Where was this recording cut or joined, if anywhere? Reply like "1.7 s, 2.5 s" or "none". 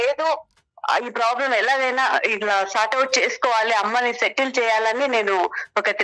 none